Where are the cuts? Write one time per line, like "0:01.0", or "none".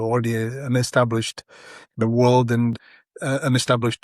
0:02.7

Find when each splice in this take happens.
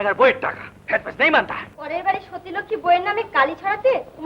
0:01.7

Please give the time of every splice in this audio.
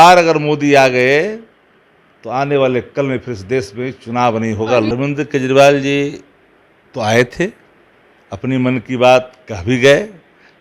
0:04.9

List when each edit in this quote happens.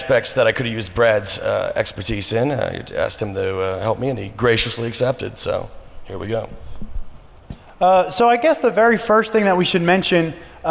0:03.8

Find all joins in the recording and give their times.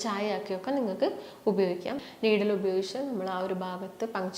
0:02.1

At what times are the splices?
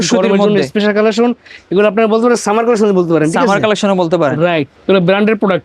0:04.7

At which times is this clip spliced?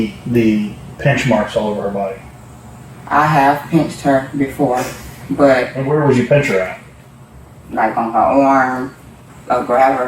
0:05.8
0:09.2

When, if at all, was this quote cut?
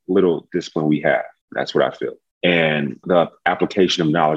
0:01.4
0:02.3
0:03.1

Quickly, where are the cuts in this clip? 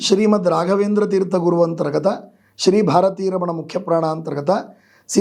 none

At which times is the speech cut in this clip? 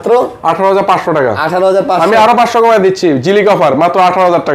none

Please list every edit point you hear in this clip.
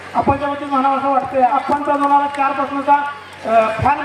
0:01.5

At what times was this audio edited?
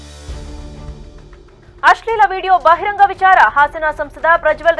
0:01.5

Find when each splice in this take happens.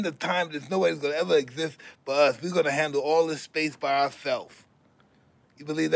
none

